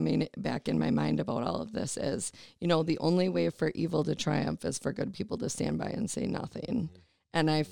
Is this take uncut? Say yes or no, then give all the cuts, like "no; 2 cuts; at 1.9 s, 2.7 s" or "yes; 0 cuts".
yes; 0 cuts